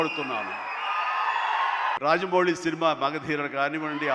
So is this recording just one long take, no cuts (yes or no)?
no